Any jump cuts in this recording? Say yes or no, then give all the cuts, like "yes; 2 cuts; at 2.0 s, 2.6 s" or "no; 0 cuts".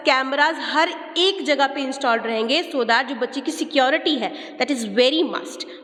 no; 0 cuts